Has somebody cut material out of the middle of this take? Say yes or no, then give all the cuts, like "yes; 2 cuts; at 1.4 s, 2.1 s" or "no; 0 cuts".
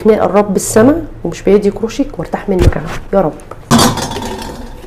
yes; 1 cut; at 3.7 s